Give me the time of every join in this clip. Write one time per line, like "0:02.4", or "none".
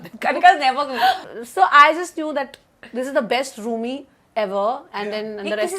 0:01.2